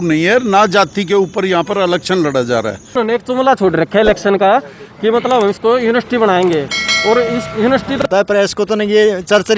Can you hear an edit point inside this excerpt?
yes; 2 cuts; at 3.0 s, 8.1 s

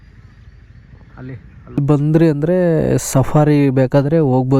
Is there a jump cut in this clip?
yes; 1 cut; at 1.8 s

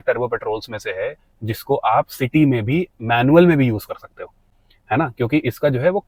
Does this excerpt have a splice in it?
no; 0 cuts

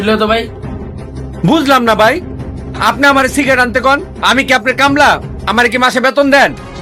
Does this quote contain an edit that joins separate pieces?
no; 0 cuts

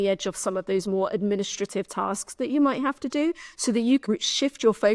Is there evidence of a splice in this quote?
yes; 1 cut; at 4.0 s

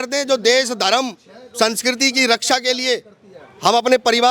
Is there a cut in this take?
no; 0 cuts

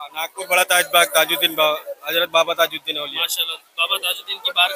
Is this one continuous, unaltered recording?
yes; 0 cuts

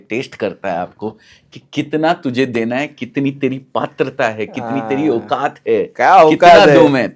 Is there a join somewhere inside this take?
no; 0 cuts

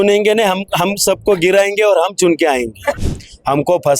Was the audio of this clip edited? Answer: yes; 1 cut; at 2.9 s

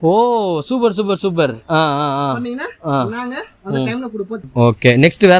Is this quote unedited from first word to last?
no; 1 cut; at 4.4 s

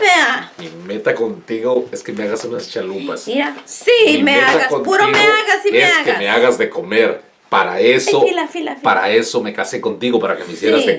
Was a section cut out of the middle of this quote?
no; 0 cuts

